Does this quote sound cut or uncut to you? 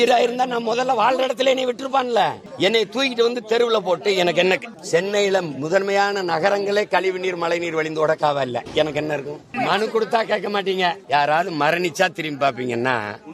cut